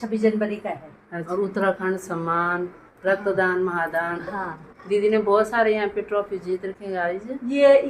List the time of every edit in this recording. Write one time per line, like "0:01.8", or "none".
0:01.1